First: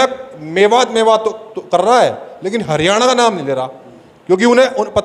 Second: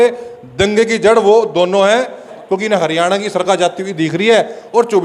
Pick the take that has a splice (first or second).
second